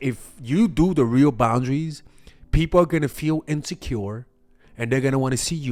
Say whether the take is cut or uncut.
uncut